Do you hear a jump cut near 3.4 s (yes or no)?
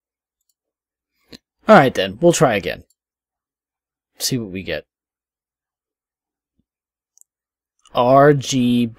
no